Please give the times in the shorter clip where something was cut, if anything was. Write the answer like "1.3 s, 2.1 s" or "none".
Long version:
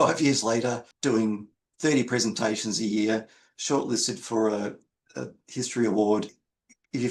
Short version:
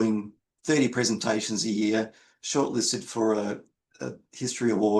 none